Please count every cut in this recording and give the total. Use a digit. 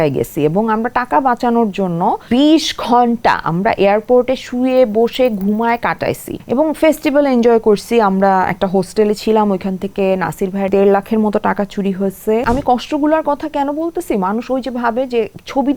4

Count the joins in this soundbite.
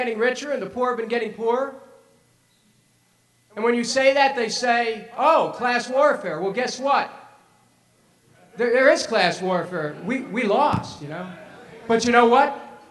1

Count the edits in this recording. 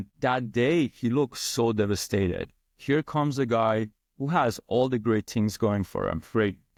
0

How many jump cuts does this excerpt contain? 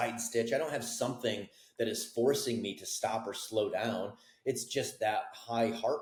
0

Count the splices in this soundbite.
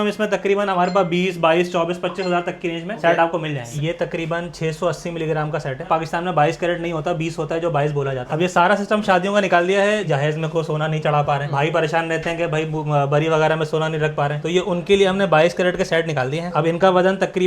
5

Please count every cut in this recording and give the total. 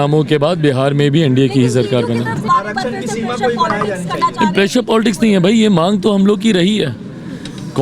1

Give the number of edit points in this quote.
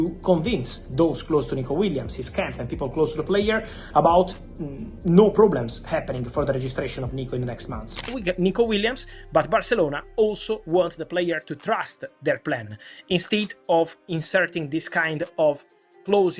1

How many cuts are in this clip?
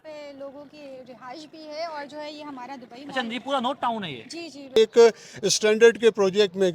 1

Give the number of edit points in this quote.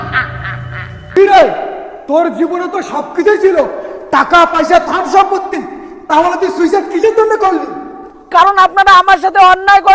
1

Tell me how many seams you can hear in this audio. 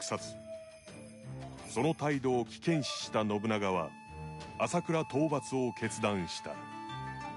1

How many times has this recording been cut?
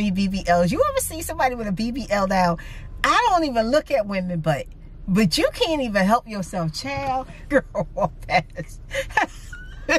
1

